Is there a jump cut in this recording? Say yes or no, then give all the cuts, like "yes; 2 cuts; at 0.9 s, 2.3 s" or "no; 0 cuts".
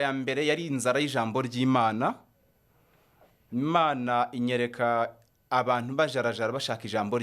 no; 0 cuts